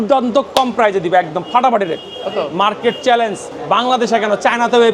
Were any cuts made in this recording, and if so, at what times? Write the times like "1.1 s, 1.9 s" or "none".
3.5 s